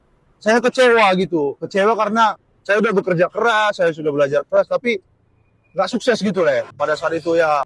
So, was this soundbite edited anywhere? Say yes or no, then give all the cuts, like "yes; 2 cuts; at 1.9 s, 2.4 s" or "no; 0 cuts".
yes; 1 cut; at 6.7 s